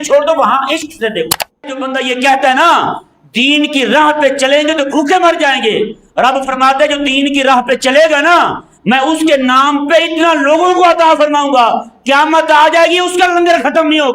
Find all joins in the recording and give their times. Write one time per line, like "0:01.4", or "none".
0:01.8